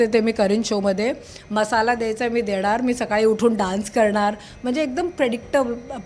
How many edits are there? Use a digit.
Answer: 0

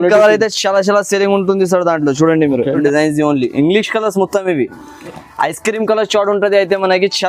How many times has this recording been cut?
1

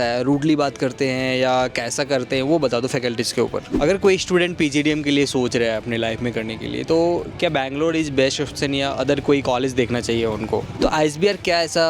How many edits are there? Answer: 2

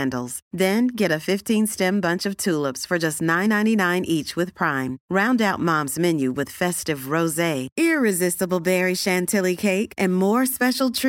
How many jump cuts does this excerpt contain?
0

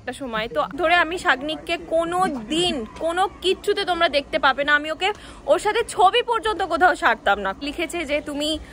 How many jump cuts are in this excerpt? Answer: 2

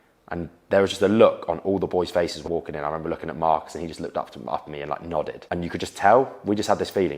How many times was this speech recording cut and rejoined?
2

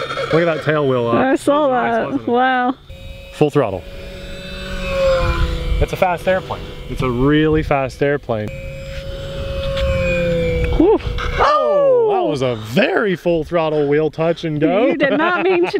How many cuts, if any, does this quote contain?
2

